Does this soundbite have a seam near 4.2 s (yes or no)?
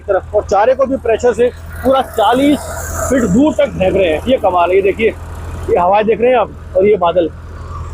no